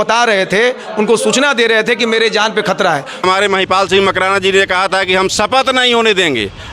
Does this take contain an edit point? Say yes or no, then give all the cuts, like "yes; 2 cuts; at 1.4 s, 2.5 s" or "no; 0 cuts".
yes; 1 cut; at 3.2 s